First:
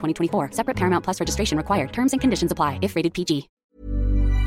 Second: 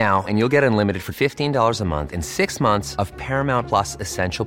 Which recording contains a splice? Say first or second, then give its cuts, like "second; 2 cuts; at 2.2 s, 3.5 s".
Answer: first; 1 cut; at 3.5 s